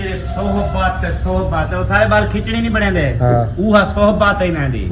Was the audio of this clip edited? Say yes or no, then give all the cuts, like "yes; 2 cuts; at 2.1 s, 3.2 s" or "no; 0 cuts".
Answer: no; 0 cuts